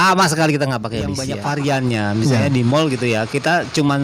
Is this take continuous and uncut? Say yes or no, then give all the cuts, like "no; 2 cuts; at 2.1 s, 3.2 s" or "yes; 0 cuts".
no; 1 cut; at 1.2 s